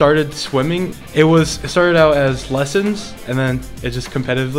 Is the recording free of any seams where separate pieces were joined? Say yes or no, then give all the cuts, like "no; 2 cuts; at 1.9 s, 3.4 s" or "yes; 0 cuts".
no; 1 cut; at 1.0 s